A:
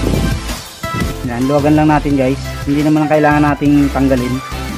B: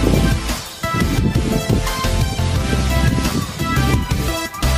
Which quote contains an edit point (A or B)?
A